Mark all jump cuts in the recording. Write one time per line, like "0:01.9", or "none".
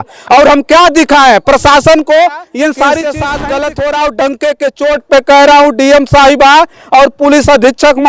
0:03.0